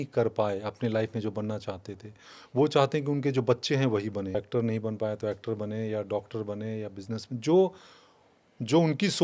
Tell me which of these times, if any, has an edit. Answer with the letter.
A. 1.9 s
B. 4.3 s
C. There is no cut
B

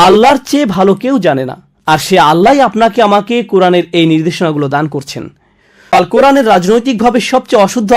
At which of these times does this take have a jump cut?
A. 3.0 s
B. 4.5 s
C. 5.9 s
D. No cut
C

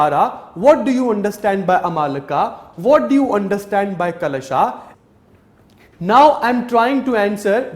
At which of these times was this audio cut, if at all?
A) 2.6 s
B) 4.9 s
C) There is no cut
B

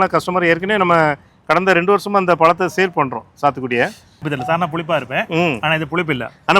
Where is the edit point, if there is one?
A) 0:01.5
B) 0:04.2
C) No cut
B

